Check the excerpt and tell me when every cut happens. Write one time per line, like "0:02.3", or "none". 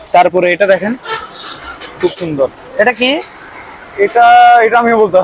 none